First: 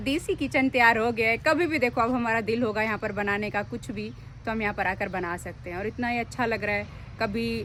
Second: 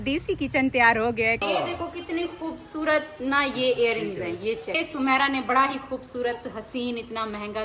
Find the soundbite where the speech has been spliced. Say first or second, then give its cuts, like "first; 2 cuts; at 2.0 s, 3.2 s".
second; 2 cuts; at 1.4 s, 4.8 s